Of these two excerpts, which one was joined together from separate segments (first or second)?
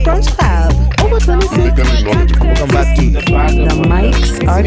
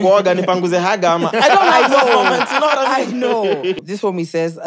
second